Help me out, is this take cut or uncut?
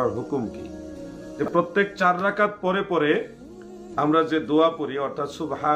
uncut